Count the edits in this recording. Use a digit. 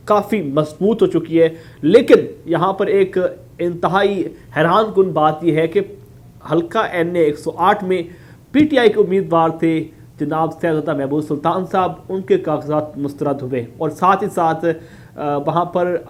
0